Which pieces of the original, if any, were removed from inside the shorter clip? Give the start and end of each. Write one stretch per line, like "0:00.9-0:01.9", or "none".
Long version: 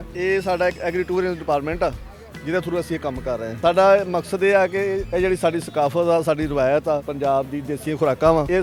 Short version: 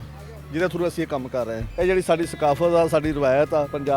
0:03.6-0:05.0